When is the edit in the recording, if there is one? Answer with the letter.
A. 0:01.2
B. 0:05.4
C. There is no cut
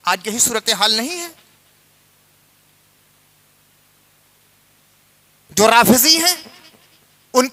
C